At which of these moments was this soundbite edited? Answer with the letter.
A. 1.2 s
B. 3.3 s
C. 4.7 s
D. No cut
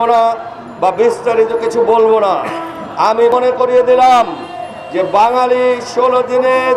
B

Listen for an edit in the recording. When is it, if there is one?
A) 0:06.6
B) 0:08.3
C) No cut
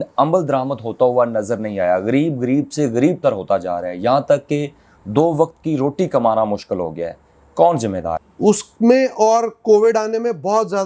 B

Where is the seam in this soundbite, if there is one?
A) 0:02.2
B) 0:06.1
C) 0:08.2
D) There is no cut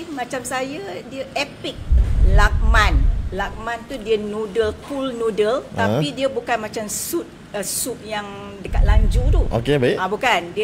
A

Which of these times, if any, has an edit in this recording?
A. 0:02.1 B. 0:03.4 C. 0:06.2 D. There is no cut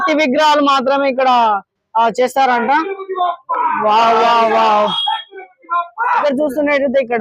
C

